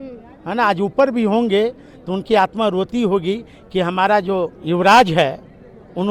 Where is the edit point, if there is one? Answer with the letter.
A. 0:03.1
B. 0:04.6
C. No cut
B